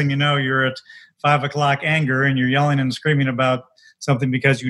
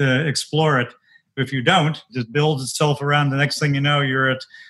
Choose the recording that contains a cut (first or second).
second